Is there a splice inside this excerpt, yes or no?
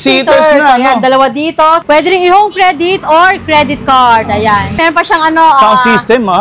yes